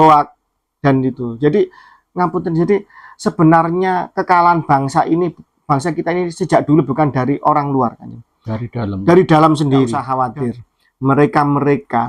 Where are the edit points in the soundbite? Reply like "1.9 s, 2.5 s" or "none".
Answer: 10.0 s